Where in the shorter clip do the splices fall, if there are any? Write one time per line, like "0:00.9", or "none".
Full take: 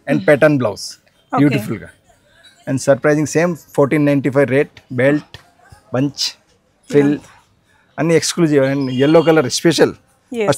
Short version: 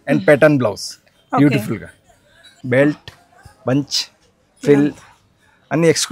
0:02.5